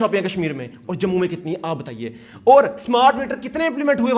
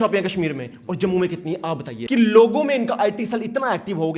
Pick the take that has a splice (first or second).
second